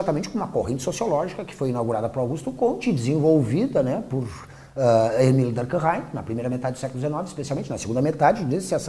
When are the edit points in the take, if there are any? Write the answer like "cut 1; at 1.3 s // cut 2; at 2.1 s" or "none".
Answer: cut 1; at 5.5 s